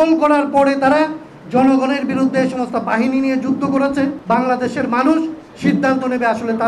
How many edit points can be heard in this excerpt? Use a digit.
1